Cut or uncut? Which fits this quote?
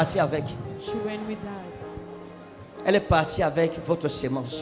uncut